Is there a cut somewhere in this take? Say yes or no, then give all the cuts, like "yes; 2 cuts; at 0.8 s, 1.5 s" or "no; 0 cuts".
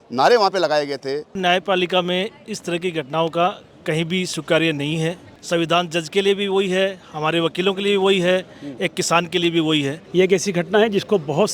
yes; 3 cuts; at 1.3 s, 5.3 s, 10.0 s